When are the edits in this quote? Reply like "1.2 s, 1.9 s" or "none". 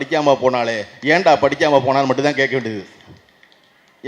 none